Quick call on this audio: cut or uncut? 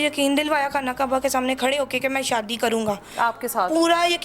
uncut